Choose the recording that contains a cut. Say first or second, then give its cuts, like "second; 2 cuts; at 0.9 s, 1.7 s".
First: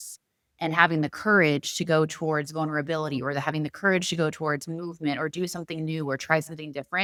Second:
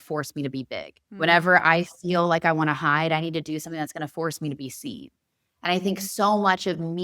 second; 1 cut; at 1.0 s